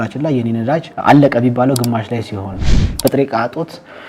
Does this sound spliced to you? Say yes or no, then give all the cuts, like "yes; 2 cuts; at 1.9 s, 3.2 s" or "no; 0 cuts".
yes; 2 cuts; at 0.9 s, 2.8 s